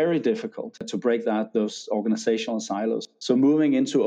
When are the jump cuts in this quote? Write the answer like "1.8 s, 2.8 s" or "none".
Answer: 0.9 s, 3.0 s